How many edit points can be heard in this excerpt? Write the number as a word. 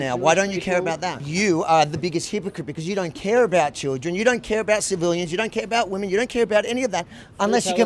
one